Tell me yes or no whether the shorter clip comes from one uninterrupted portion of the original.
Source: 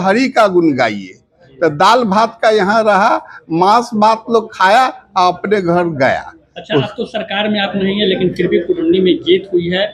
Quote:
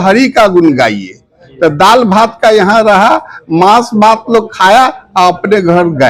yes